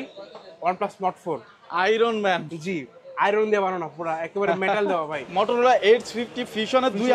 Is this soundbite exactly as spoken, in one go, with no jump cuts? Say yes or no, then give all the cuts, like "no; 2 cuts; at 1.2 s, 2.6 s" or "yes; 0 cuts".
no; 1 cut; at 5.2 s